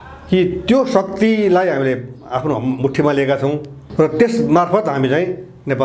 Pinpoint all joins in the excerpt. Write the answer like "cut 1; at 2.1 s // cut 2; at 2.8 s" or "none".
cut 1; at 3.8 s

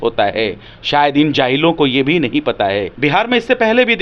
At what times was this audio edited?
cut 1; at 2.9 s

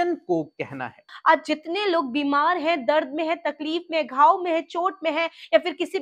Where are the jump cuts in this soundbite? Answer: cut 1; at 1.1 s

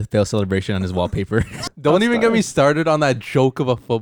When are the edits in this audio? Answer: cut 1; at 1.6 s

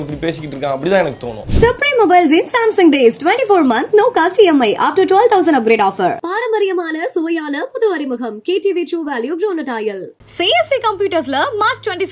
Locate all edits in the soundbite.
cut 1; at 1.4 s

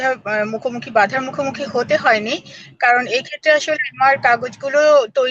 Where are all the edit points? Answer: none

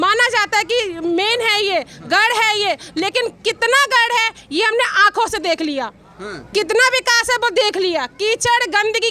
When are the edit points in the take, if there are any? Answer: none

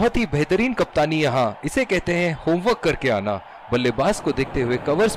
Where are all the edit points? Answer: none

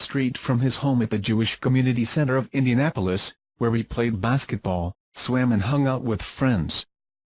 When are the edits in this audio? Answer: cut 1; at 1.9 s

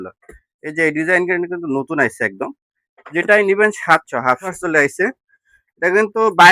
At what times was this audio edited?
cut 1; at 4.6 s

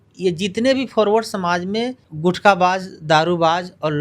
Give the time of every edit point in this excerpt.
cut 1; at 2.0 s

